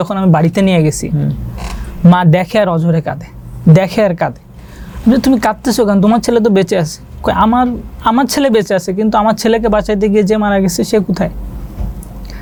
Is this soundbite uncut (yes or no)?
yes